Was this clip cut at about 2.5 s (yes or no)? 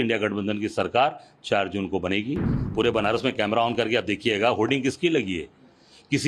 yes